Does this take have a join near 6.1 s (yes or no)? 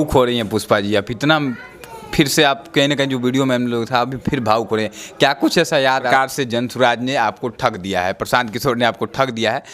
yes